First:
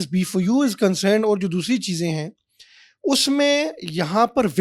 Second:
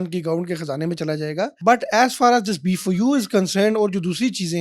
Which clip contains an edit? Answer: second; 1 cut; at 1.6 s

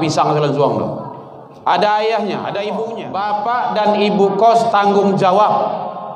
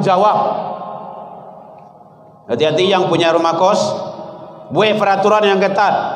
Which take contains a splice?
first; 1 cut; at 3.0 s

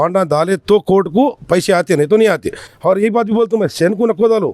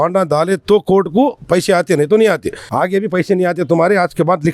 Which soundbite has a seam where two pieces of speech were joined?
second; 1 cut; at 2.7 s

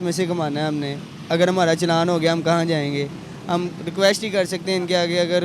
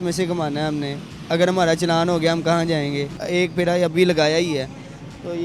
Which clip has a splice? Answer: second; 1 cut; at 3.2 s

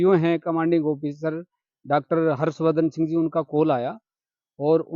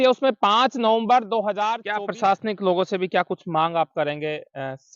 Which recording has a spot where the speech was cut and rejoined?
second; 1 cut; at 1.8 s

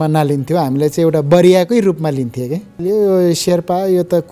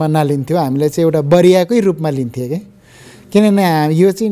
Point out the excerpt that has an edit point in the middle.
first; 1 cut; at 2.8 s

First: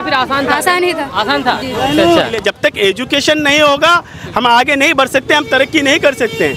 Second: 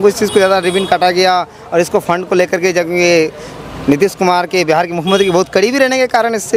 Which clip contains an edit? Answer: first; 1 cut; at 2.4 s

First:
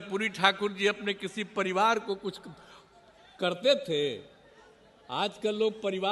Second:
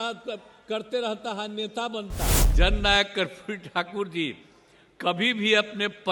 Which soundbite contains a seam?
second; 1 cut; at 2.4 s

